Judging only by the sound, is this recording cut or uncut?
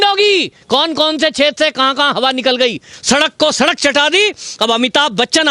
cut